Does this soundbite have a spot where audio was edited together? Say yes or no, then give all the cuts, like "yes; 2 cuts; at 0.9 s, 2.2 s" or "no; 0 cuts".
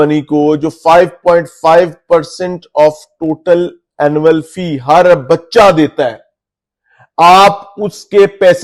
no; 0 cuts